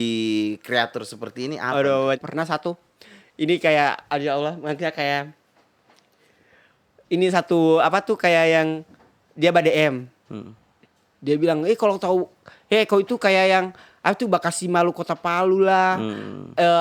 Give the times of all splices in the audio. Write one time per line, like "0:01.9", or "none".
0:02.2